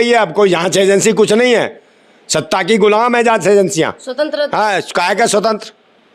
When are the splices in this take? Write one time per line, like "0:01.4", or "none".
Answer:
none